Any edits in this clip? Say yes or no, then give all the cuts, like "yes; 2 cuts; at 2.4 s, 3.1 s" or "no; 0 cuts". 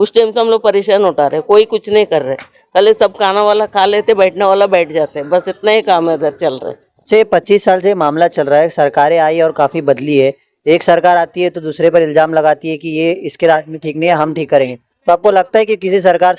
no; 0 cuts